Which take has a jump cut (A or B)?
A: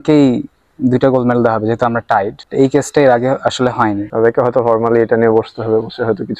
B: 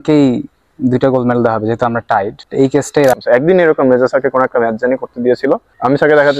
B